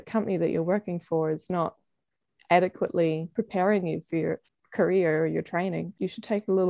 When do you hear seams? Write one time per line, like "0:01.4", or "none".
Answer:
0:03.3
0:04.5
0:05.9